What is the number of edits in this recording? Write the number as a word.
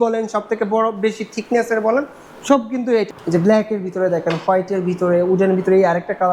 one